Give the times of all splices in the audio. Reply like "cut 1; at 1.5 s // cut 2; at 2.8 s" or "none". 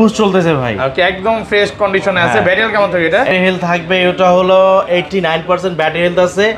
cut 1; at 3.3 s